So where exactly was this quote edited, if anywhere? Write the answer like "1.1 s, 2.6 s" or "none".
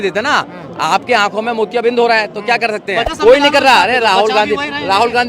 3.1 s